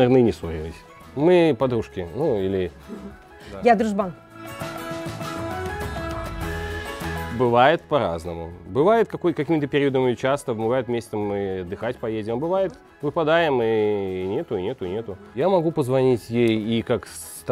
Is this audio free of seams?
yes; 0 cuts

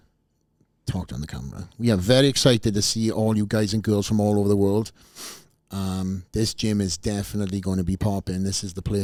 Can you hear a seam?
no; 0 cuts

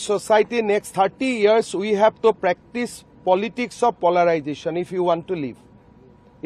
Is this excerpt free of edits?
yes; 0 cuts

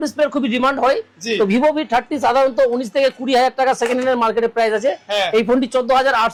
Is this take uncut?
yes; 0 cuts

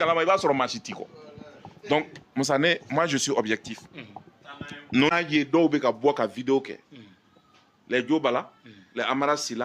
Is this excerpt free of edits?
no; 1 cut; at 5.1 s

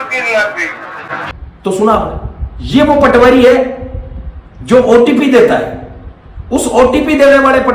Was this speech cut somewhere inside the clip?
yes; 1 cut; at 1.2 s

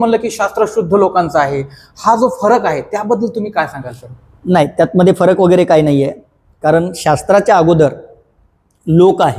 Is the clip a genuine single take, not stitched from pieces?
yes; 0 cuts

